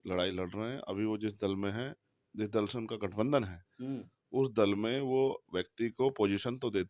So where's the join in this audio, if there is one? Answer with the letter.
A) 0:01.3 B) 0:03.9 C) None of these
C